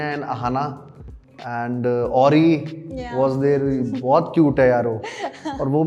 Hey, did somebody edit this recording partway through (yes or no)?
no